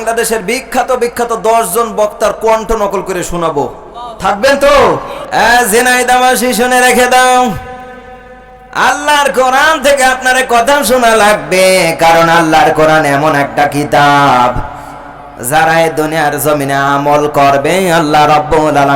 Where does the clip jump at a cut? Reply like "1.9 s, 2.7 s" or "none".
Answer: 5.1 s